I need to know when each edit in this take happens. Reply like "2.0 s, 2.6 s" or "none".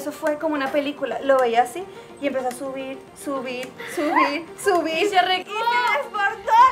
none